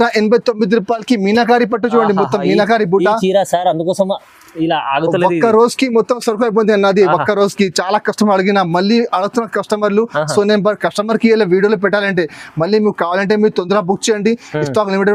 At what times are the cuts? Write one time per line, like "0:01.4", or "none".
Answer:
none

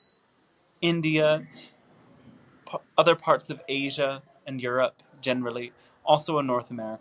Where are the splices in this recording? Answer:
none

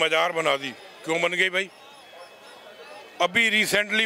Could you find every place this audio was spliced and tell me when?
none

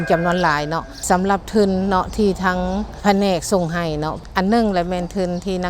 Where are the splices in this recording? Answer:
0:00.9
0:03.0
0:04.2

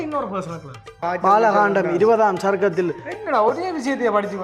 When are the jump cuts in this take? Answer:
0:01.0

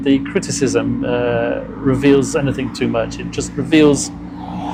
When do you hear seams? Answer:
none

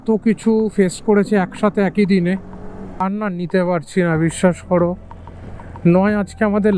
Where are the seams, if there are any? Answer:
0:03.0

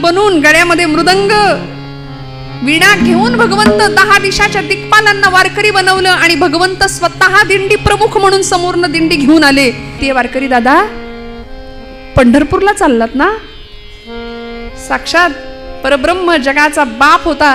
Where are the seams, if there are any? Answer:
0:10.0

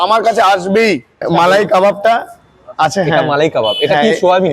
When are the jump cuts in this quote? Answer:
0:01.2

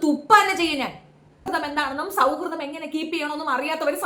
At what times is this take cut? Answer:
0:01.4

